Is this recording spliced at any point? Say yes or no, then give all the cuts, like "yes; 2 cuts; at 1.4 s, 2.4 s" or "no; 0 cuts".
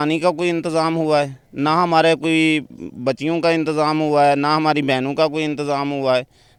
no; 0 cuts